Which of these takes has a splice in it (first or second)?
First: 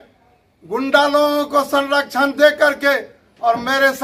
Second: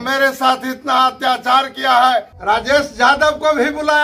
second